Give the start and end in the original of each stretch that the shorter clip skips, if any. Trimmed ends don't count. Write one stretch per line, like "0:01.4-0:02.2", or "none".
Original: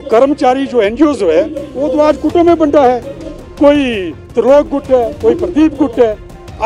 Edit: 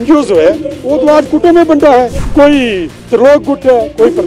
0:03.1-0:03.4